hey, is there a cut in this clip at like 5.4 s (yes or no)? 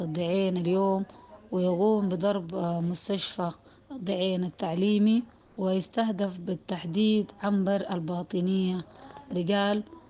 yes